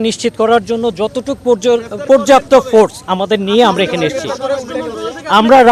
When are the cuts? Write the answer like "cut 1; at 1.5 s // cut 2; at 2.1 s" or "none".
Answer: none